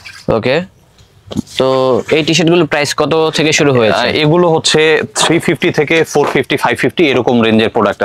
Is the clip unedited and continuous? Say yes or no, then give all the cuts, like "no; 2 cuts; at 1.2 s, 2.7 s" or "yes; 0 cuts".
yes; 0 cuts